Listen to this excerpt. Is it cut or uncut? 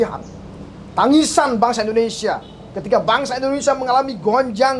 uncut